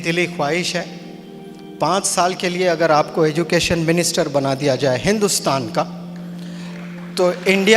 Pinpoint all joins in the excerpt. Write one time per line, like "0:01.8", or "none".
none